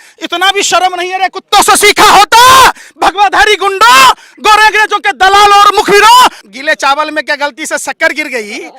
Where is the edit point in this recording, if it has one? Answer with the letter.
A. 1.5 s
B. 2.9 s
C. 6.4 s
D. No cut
C